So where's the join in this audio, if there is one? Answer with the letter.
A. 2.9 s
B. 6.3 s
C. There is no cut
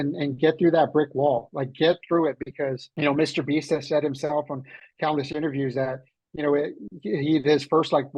A